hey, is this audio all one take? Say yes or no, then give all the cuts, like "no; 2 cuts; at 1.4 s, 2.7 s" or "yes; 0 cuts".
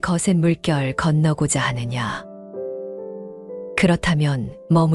no; 2 cuts; at 2.2 s, 3.7 s